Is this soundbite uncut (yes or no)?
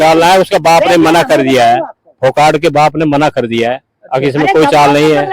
yes